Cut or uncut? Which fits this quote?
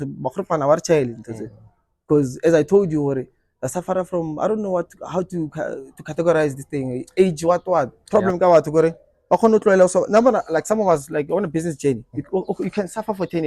cut